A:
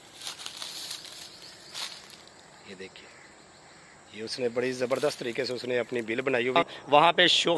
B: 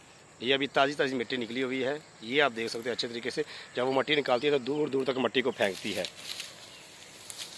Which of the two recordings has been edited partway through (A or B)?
A